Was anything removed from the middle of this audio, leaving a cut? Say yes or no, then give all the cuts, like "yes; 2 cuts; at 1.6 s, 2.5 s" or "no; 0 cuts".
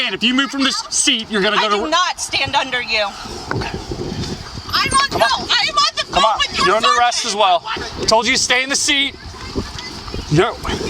yes; 2 cuts; at 4.5 s, 7.8 s